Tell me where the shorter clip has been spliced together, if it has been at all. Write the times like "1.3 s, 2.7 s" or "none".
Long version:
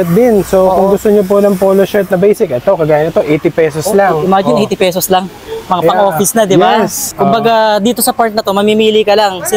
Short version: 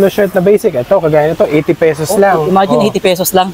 none